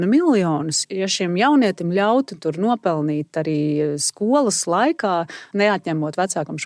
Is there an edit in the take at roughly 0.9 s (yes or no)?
yes